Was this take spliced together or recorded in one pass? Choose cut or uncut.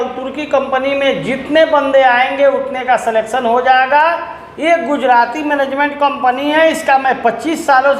uncut